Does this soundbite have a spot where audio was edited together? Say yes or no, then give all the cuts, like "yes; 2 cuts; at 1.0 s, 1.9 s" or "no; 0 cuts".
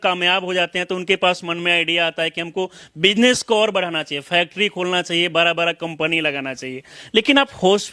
no; 0 cuts